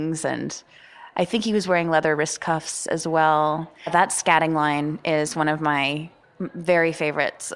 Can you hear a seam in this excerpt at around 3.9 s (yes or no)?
yes